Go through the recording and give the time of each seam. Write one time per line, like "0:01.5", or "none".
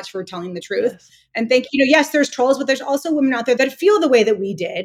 0:03.6